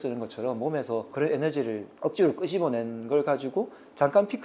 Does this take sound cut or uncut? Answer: cut